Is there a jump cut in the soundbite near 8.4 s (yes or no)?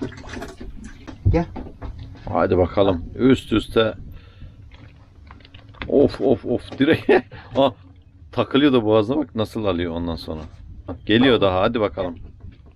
no